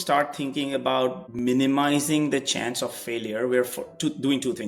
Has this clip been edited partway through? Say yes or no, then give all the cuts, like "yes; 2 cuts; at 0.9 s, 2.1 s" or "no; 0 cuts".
yes; 1 cut; at 1.3 s